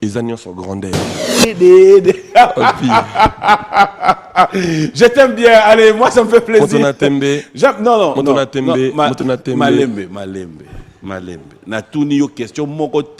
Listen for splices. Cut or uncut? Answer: cut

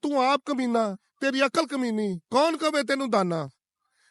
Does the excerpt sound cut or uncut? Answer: uncut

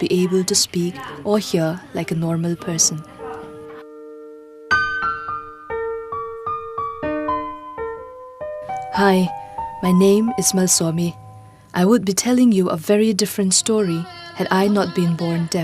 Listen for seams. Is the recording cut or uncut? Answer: cut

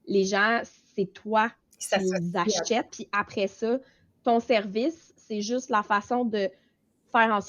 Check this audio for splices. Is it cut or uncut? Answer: cut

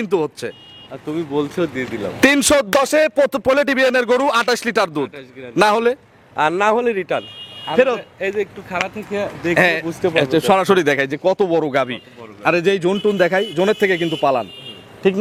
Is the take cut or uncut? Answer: uncut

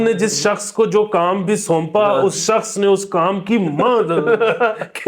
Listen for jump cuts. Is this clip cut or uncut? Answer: uncut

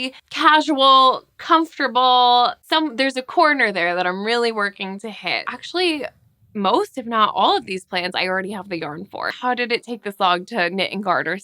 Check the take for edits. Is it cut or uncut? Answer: cut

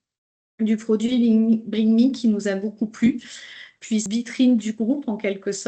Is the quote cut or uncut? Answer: cut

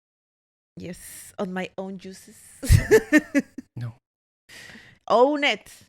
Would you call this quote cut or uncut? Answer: cut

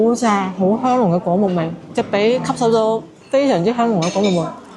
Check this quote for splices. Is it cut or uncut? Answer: uncut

